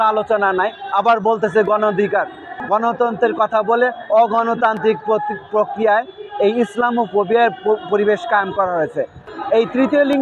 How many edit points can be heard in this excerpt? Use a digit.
2